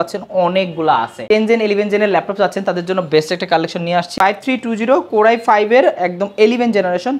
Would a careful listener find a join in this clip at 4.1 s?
yes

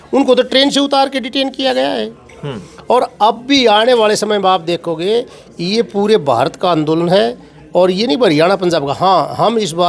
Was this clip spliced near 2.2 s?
no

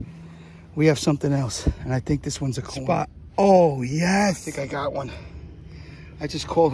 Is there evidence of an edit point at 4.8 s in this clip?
yes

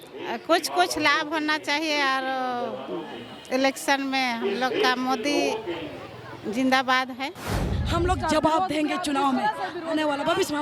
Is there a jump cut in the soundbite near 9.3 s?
no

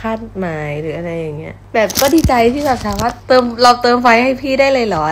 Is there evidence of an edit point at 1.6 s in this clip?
no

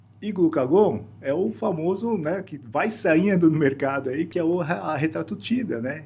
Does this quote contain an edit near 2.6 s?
no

